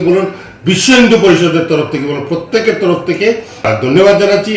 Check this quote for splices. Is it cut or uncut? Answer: cut